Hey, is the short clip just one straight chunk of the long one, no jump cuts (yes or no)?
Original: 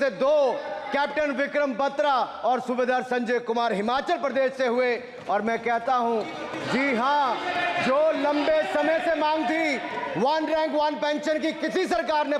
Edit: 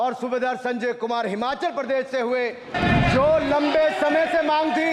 no